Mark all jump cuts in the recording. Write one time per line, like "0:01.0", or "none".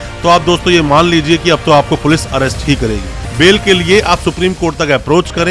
0:03.1